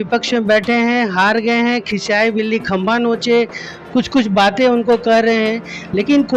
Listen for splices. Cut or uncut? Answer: uncut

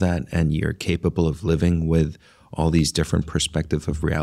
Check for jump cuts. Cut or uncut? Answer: uncut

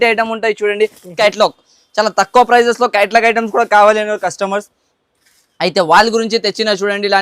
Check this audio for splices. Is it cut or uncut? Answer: cut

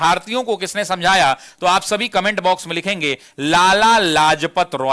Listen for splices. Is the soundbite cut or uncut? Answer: uncut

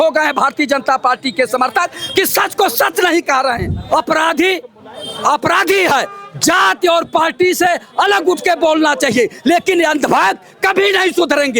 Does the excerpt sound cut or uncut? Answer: cut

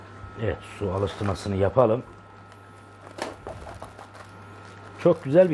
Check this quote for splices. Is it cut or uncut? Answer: uncut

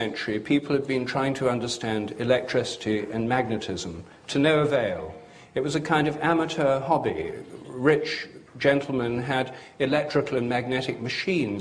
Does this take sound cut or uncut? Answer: uncut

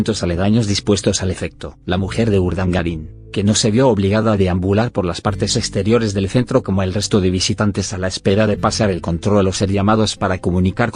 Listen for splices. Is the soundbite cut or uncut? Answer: uncut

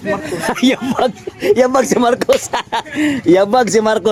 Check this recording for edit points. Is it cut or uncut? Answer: uncut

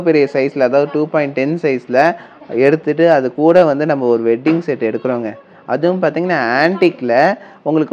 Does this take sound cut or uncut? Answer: uncut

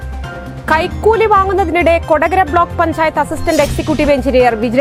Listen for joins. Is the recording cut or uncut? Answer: uncut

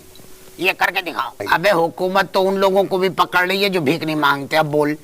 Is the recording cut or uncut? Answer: cut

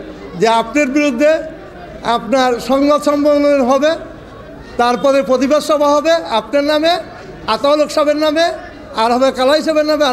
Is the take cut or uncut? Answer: uncut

